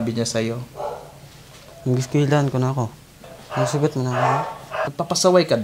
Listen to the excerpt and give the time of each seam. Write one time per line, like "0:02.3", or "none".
0:03.2
0:04.9